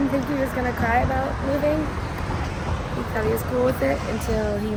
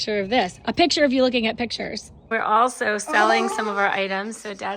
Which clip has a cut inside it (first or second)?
second